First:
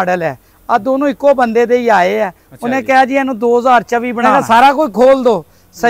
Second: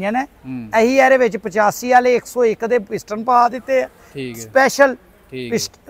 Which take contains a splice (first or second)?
first